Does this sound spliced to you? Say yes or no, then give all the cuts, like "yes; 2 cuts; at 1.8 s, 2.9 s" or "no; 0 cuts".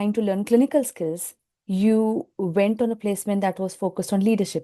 no; 0 cuts